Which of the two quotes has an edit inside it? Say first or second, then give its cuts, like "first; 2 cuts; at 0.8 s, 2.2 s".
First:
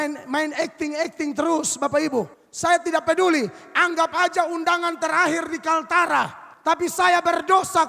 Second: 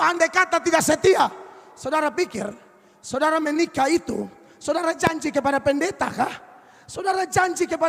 first; 2 cuts; at 2.4 s, 6.4 s